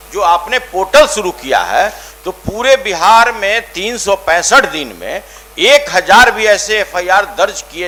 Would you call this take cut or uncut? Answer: uncut